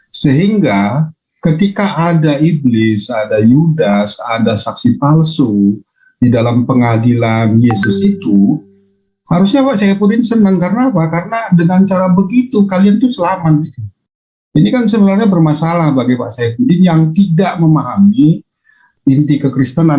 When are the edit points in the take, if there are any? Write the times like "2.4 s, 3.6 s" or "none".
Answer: 18.9 s